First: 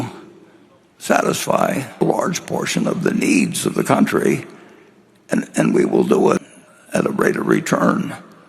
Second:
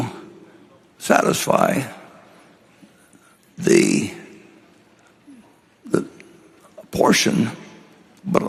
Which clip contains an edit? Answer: first; 2 cuts; at 2.0 s, 6.4 s

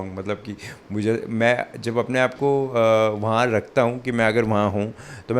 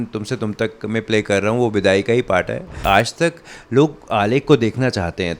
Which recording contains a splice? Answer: second; 1 cut; at 2.7 s

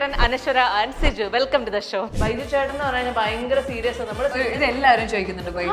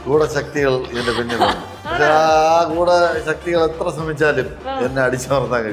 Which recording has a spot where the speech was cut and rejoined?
first; 2 cuts; at 2.1 s, 4.3 s

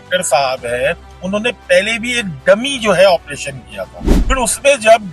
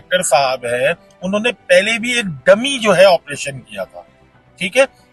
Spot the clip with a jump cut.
first; 1 cut; at 4.0 s

